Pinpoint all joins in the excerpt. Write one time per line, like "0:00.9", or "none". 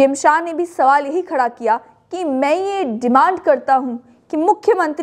none

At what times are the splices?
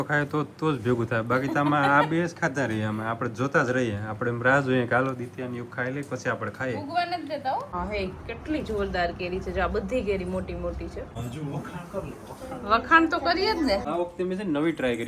0:07.7
0:11.1
0:13.8

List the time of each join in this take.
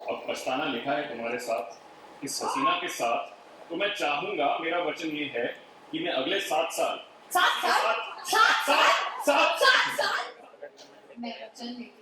0:10.1

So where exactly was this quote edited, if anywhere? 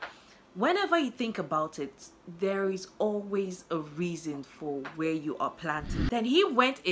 0:05.9

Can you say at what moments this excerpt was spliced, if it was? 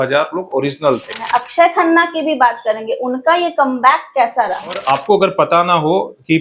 0:01.2
0:04.8

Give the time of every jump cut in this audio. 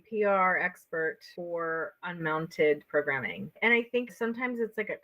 0:04.1

